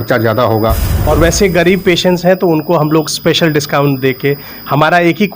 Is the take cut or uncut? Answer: cut